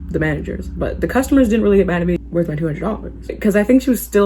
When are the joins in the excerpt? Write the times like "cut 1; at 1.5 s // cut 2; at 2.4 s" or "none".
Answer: cut 1; at 2.2 s // cut 2; at 3.3 s